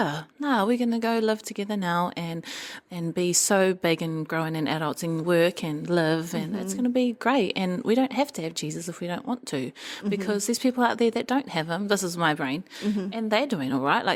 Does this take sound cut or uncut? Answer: uncut